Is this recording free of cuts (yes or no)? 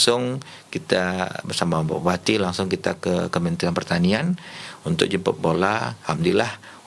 yes